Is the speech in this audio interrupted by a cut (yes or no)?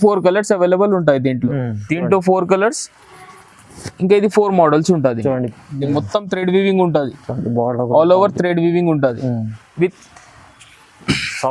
yes